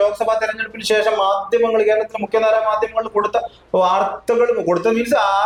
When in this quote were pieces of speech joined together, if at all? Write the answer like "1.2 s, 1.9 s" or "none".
none